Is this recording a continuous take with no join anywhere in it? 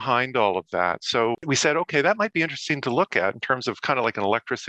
no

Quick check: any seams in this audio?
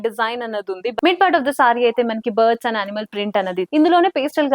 yes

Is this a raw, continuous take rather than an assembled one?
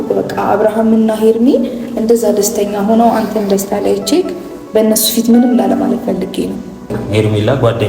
no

